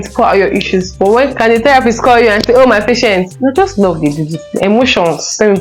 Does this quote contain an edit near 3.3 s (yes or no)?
yes